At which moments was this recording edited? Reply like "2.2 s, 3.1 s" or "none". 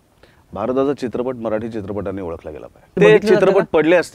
3.0 s